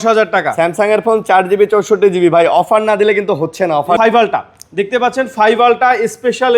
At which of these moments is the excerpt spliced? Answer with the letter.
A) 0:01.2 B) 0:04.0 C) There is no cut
B